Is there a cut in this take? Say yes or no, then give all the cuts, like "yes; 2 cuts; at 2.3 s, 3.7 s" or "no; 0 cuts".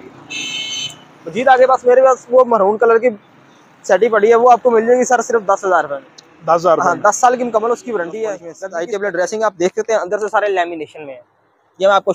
yes; 1 cut; at 8.5 s